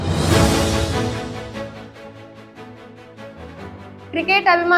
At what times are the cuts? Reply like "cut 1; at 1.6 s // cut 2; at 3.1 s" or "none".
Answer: cut 1; at 1.3 s // cut 2; at 3.3 s